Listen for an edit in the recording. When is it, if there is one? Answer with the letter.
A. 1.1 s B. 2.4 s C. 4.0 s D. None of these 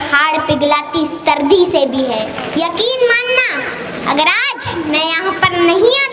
B